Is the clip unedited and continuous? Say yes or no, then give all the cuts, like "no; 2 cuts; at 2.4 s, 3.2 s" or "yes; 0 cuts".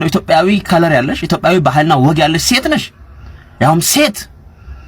yes; 0 cuts